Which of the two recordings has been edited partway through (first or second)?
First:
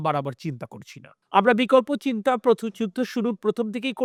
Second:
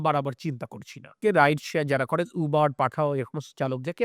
second